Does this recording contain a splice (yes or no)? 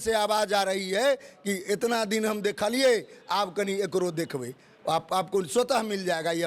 no